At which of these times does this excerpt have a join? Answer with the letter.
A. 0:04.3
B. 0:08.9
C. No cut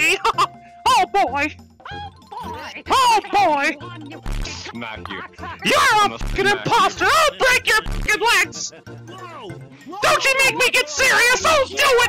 B